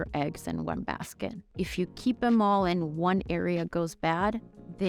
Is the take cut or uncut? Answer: cut